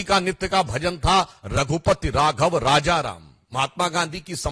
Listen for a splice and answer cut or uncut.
uncut